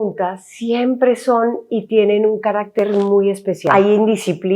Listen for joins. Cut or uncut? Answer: cut